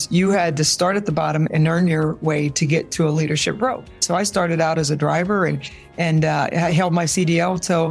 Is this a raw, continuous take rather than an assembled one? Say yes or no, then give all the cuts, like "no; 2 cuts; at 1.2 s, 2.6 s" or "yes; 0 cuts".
no; 2 cuts; at 1.5 s, 4.0 s